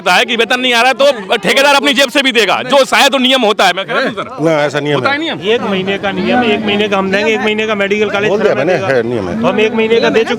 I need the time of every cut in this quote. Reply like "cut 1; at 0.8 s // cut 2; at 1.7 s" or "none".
none